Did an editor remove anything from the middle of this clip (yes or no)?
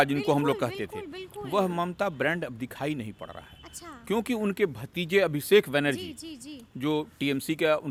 no